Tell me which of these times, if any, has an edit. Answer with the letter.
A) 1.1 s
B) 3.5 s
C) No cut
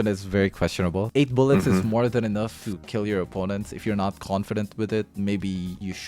C